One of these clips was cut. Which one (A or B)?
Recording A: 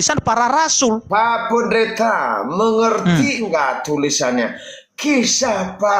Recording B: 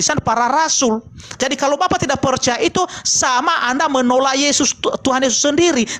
A